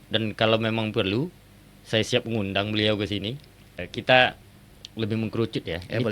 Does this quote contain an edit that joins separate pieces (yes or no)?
yes